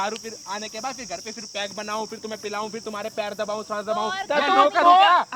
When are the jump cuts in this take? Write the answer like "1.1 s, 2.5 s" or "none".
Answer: none

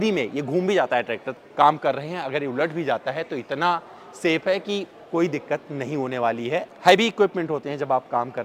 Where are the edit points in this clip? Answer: 1.3 s, 6.7 s

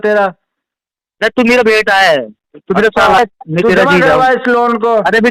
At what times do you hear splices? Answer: 3.2 s

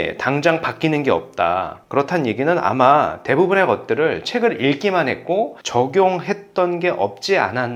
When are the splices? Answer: none

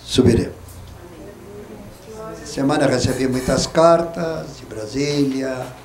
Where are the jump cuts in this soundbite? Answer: none

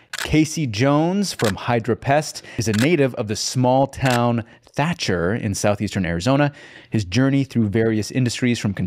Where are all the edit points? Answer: 2.5 s

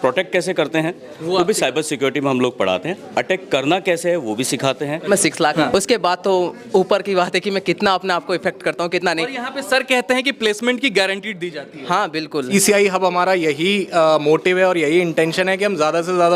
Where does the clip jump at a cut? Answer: 5.4 s, 12.5 s

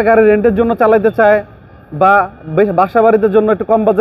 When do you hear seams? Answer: none

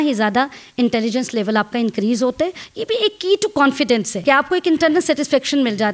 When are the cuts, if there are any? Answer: 2.6 s, 4.1 s

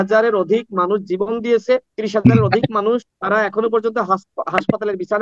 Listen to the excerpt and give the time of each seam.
2.0 s, 3.1 s

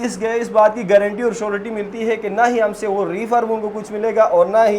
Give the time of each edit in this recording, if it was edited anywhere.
none

